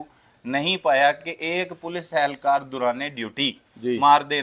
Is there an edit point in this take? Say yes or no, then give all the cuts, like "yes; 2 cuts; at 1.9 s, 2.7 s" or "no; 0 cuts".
no; 0 cuts